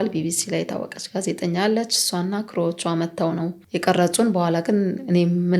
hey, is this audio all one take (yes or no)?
no